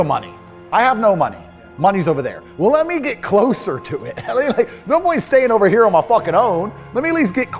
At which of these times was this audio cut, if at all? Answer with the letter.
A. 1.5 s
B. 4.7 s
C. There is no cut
C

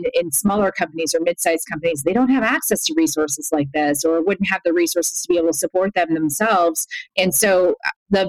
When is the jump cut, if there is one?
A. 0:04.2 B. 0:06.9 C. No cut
B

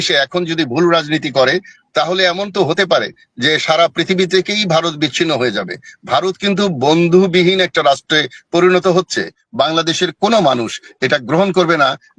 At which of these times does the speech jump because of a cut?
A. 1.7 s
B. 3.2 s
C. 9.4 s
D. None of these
C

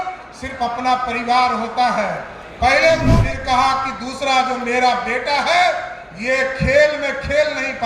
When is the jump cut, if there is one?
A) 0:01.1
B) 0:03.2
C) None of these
B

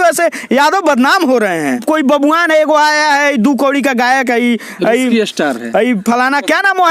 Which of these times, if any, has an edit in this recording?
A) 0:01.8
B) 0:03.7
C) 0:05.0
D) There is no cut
A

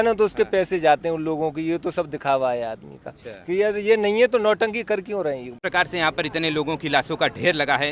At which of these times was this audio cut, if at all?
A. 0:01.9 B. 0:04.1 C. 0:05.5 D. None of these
C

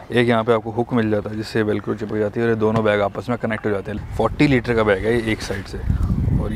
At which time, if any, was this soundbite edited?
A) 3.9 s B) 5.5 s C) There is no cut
A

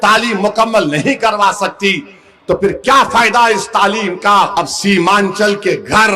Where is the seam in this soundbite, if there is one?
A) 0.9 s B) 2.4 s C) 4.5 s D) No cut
C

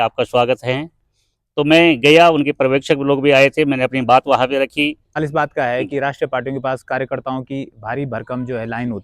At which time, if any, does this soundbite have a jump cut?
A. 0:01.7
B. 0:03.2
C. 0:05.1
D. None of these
C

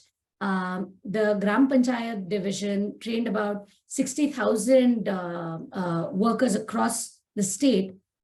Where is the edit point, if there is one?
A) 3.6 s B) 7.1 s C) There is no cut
C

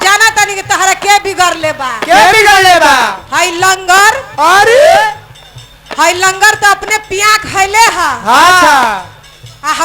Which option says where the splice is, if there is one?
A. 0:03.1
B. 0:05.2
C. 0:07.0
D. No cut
D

